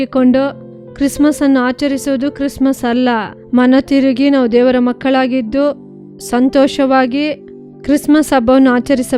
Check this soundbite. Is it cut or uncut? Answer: uncut